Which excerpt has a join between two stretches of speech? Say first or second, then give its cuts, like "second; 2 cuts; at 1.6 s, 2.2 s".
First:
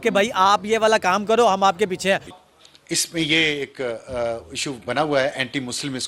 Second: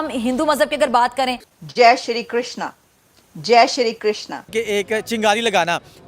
second; 1 cut; at 4.5 s